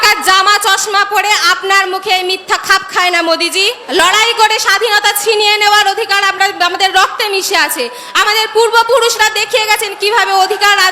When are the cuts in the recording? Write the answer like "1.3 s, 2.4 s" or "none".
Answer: 3.8 s